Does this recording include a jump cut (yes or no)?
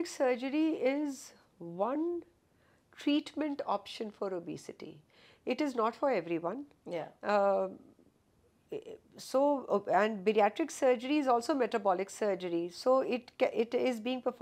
no